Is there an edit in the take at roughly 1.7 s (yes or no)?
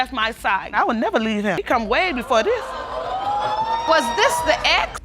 no